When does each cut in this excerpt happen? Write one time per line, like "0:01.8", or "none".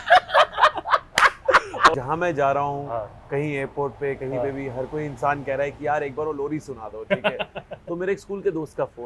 0:01.9